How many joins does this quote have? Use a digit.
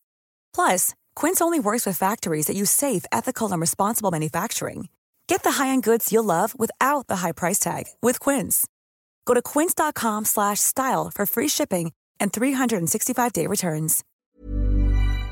1